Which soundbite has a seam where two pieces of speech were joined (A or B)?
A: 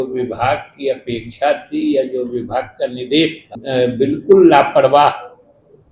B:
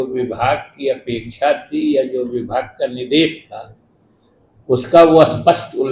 A